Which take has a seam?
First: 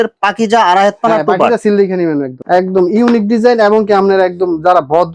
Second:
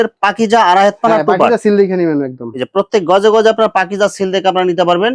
first; 1 cut; at 2.4 s

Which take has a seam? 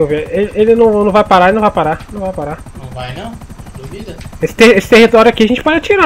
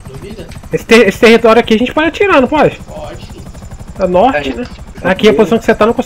second; 1 cut; at 5.0 s

